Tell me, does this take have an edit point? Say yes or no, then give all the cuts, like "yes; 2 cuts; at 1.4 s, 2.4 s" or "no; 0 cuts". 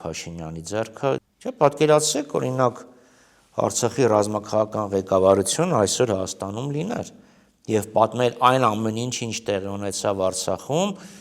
yes; 1 cut; at 1.2 s